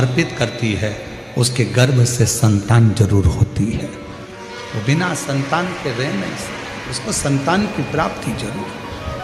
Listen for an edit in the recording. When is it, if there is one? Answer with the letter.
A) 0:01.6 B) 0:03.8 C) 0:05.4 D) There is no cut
D